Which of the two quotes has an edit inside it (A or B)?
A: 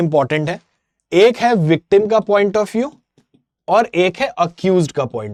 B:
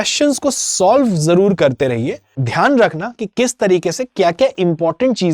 B